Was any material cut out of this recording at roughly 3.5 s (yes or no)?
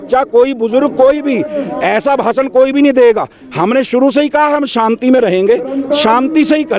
no